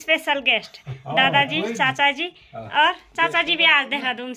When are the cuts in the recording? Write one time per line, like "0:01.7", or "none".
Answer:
none